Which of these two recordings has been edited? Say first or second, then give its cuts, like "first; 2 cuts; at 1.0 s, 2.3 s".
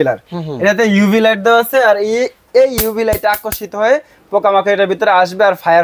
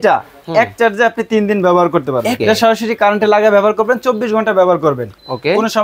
second; 1 cut; at 2.4 s